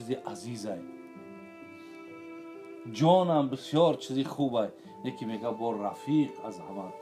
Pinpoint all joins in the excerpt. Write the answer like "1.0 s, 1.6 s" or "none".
0.8 s, 2.4 s